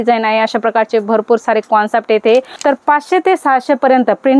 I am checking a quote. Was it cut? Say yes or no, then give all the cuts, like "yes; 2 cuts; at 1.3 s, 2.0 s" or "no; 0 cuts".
yes; 1 cut; at 2.5 s